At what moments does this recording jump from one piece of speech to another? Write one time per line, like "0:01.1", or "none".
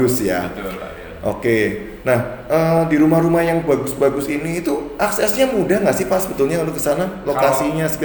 none